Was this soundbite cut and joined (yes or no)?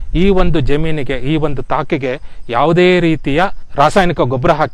yes